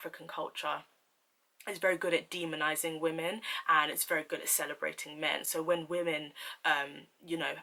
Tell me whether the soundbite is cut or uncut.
uncut